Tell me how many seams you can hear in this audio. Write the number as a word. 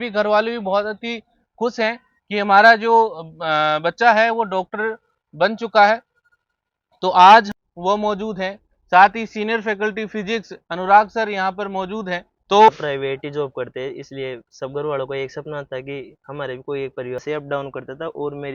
three